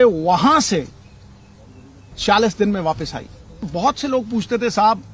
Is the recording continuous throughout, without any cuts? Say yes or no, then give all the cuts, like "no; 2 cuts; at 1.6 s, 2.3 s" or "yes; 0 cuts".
no; 1 cut; at 3.7 s